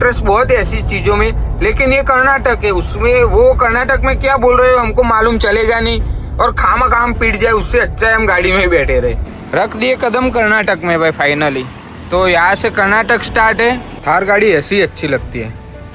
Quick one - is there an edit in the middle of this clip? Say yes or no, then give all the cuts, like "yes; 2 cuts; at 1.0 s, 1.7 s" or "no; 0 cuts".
yes; 2 cuts; at 9.3 s, 14.0 s